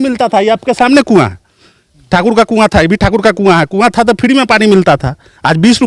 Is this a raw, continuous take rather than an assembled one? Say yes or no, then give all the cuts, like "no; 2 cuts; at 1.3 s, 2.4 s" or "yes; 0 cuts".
yes; 0 cuts